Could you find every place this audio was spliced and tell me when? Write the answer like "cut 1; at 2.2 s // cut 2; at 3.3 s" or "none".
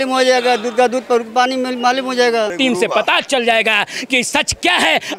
cut 1; at 2.5 s